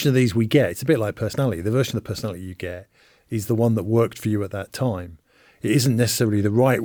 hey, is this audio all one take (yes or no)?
yes